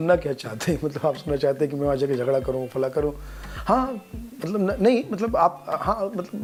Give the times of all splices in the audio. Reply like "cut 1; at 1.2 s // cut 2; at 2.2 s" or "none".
none

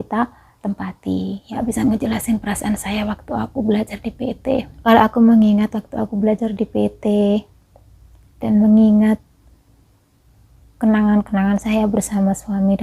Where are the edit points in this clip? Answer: cut 1; at 1.5 s // cut 2; at 4.7 s

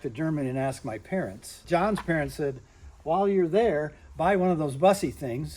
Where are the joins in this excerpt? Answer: cut 1; at 1.6 s

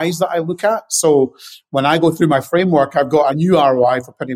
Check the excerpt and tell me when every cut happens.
cut 1; at 3.3 s

